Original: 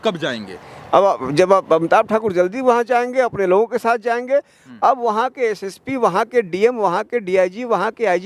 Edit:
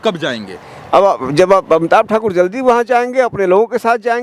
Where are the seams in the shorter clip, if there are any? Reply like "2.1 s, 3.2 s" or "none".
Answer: none